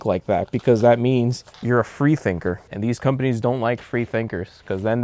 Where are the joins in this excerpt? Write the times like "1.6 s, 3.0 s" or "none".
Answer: 1.5 s, 2.7 s